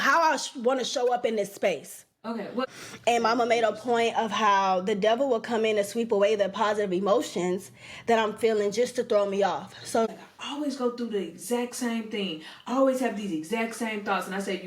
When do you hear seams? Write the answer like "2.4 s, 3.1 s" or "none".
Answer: 2.6 s, 10.1 s